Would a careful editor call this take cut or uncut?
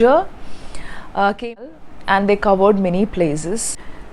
cut